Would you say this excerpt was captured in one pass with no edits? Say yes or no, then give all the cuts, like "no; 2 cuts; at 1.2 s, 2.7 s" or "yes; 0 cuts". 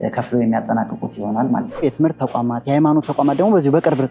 no; 1 cut; at 1.8 s